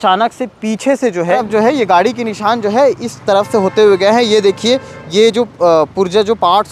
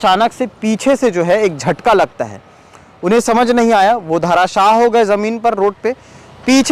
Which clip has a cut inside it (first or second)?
first